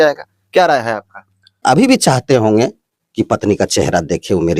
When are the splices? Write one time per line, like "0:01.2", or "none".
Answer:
0:01.6